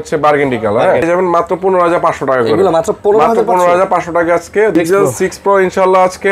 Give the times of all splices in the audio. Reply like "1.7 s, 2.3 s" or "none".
1.0 s, 4.7 s